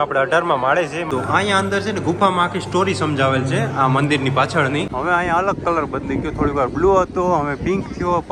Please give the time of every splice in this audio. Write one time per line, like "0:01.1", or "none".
0:01.0
0:04.9